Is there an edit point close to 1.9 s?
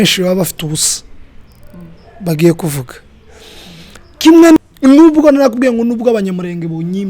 no; 1 cut; at 4.6 s

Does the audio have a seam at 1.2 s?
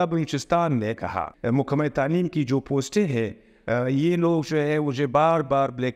yes; 1 cut; at 1.2 s

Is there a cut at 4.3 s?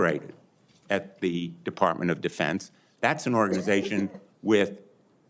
no; 1 cut; at 2.8 s

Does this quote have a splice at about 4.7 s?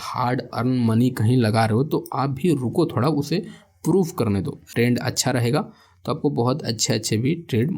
yes; 1 cut; at 4.7 s

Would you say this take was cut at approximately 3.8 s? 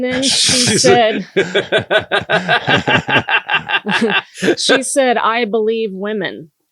no; 0 cuts

